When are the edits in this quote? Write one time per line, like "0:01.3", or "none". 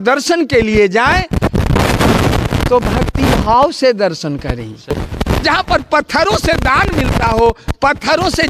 0:05.0